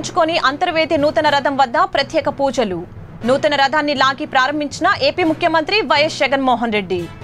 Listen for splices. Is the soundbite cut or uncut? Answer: uncut